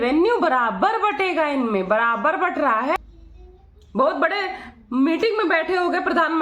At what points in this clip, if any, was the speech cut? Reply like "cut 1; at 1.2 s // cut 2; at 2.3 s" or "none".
cut 1; at 2.9 s